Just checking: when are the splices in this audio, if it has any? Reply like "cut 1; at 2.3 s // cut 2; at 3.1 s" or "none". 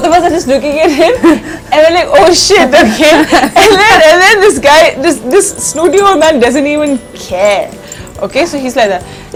none

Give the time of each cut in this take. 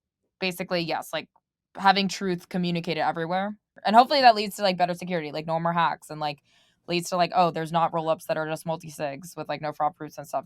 cut 1; at 3.7 s

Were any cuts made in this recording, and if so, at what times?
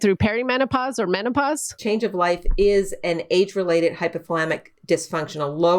cut 1; at 1.7 s

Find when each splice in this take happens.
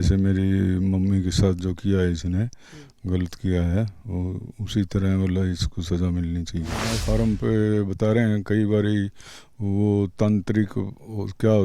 cut 1; at 7.0 s

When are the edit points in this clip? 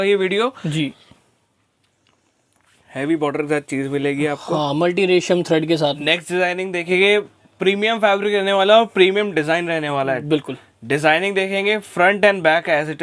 cut 1; at 1.0 s // cut 2; at 6.0 s

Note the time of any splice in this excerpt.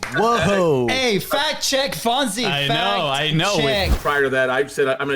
cut 1; at 3.9 s

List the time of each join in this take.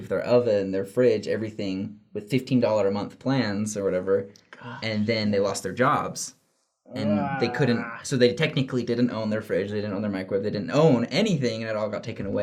none

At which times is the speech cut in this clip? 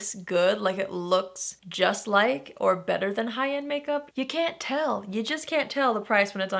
cut 1; at 4.1 s

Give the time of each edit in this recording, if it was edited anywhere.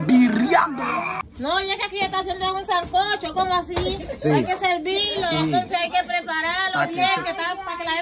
cut 1; at 1.2 s

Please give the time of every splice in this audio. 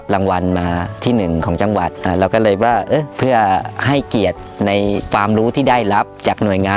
cut 1; at 1.0 s // cut 2; at 2.0 s // cut 3; at 3.1 s // cut 4; at 3.7 s

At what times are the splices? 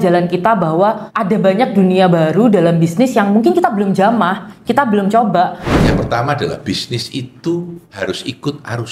cut 1; at 1.1 s // cut 2; at 5.6 s // cut 3; at 8.0 s

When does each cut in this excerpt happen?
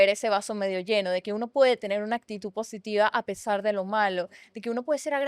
none

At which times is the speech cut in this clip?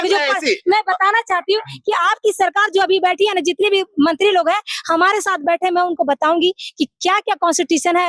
none

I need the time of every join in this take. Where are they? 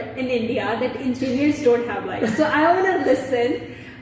none

